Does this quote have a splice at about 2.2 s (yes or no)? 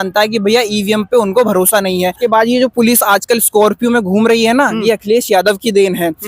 yes